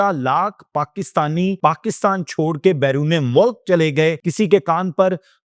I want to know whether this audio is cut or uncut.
cut